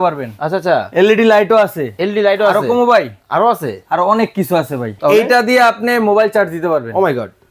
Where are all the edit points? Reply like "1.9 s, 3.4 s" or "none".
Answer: 4.9 s